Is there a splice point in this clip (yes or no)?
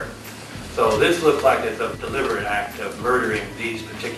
yes